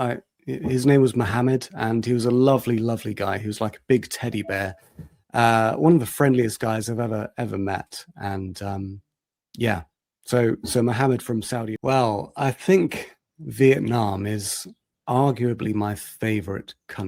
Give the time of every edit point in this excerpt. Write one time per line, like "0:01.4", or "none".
0:11.7